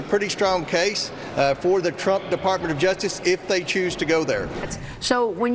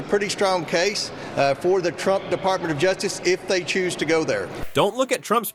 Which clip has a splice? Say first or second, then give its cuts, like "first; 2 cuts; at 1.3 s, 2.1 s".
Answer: first; 1 cut; at 4.6 s